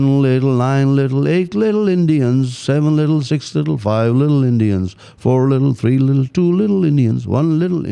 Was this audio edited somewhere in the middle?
no; 0 cuts

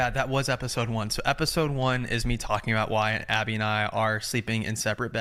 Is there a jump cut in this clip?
no; 0 cuts

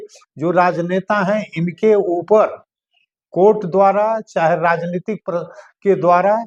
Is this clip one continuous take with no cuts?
yes; 0 cuts

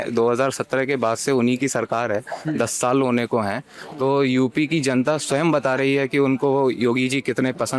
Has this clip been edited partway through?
no; 0 cuts

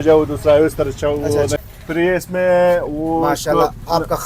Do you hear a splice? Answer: yes; 1 cut; at 1.6 s

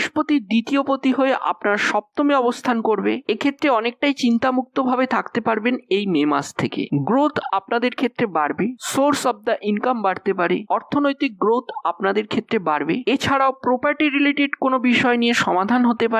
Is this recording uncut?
yes; 0 cuts

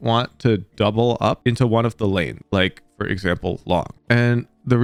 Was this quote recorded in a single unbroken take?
yes; 0 cuts

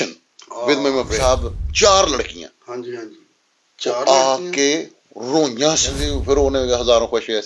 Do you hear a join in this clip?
yes; 2 cuts; at 1.2 s, 5.9 s

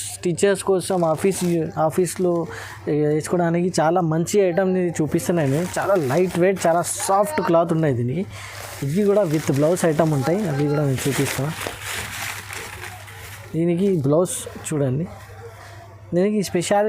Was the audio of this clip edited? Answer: no; 0 cuts

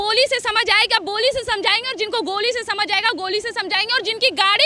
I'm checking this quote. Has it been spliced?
no; 0 cuts

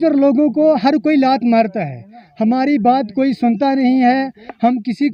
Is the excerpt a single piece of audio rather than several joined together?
yes; 0 cuts

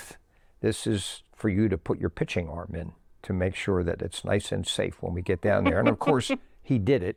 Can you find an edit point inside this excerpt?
no; 0 cuts

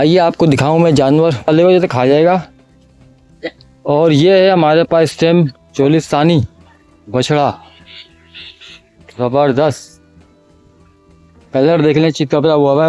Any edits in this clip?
yes; 1 cut; at 1.5 s

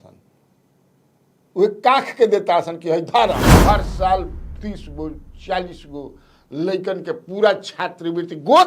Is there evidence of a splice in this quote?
yes; 1 cut; at 3.5 s

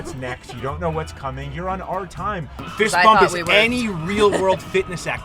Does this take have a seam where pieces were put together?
yes; 1 cut; at 2.7 s

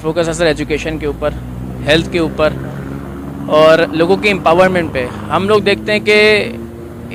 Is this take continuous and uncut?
yes; 0 cuts

